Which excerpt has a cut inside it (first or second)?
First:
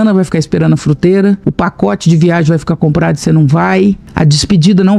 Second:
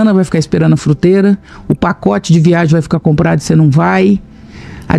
first